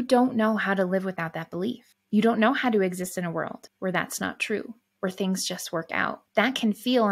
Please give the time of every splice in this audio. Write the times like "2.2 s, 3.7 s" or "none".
3.6 s, 6.2 s